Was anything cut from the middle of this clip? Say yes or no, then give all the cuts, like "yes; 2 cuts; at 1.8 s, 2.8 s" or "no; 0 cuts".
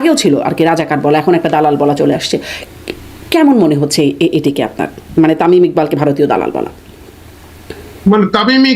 no; 0 cuts